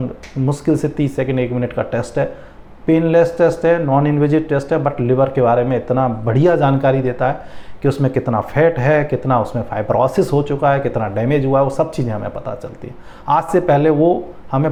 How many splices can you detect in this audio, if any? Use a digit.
0